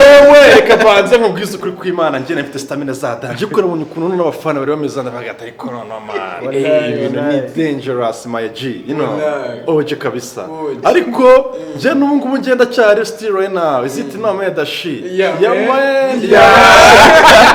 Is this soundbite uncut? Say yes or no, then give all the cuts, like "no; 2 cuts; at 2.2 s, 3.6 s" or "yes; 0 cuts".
yes; 0 cuts